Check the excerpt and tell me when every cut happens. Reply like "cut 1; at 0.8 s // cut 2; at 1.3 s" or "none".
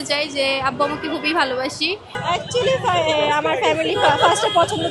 none